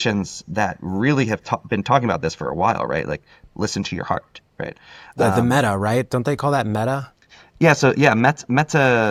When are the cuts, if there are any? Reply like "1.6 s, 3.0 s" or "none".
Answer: none